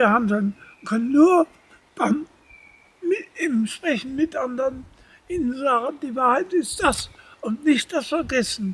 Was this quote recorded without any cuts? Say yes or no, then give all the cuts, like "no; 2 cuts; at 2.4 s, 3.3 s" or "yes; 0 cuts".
yes; 0 cuts